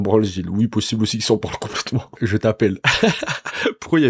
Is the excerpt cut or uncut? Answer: uncut